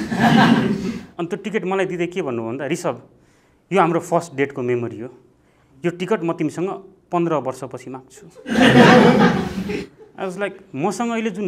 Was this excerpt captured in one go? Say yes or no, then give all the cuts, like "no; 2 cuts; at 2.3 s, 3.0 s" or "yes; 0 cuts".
yes; 0 cuts